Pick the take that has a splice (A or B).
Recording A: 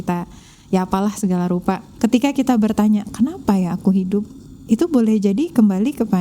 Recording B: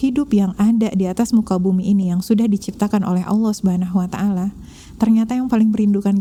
A